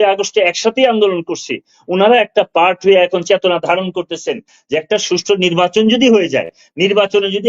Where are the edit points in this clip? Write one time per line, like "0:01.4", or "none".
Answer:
0:04.5